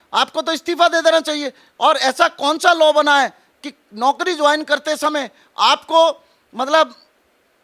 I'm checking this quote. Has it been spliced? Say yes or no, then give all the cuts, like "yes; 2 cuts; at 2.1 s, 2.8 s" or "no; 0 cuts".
no; 0 cuts